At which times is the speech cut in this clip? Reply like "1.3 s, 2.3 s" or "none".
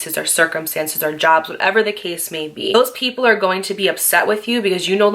2.7 s

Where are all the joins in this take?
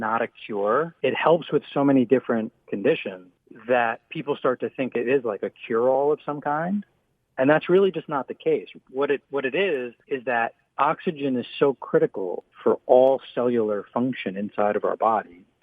0.9 s

